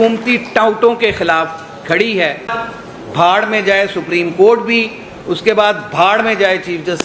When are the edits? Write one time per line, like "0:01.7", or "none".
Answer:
0:02.7